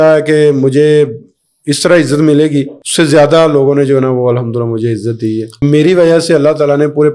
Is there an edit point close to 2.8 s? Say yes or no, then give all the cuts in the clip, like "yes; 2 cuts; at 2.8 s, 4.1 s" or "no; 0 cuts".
yes; 2 cuts; at 2.8 s, 5.6 s